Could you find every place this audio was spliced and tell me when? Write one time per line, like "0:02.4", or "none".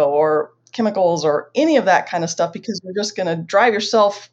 none